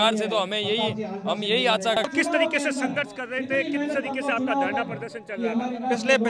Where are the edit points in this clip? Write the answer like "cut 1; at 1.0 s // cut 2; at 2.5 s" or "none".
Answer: cut 1; at 2.0 s